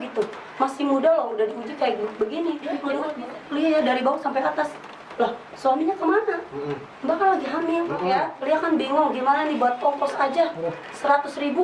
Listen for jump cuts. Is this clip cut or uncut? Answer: cut